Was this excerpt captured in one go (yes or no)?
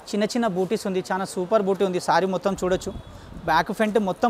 yes